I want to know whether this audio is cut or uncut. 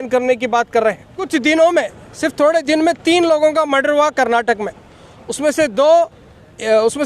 cut